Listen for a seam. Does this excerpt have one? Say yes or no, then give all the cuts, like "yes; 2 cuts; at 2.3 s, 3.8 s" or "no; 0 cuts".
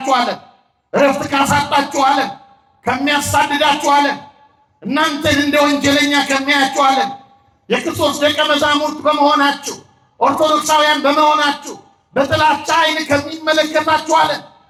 no; 0 cuts